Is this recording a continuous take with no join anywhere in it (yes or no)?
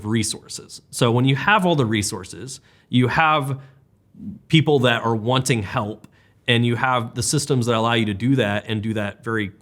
yes